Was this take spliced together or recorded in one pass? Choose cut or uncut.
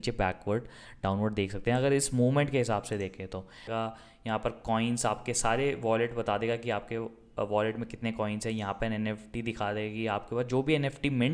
cut